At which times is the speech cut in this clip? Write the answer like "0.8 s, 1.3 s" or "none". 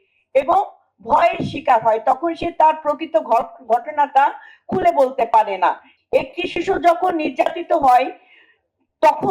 5.9 s